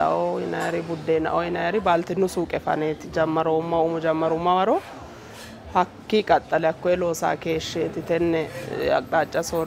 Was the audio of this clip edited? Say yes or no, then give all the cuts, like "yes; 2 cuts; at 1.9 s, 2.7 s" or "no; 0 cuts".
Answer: no; 0 cuts